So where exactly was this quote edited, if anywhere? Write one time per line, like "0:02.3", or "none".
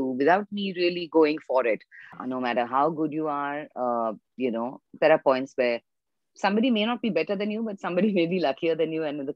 0:02.1